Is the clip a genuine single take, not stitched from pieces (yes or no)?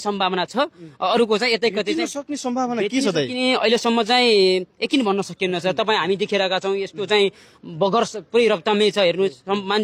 yes